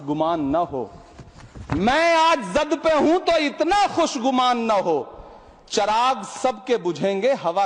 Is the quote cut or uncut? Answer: uncut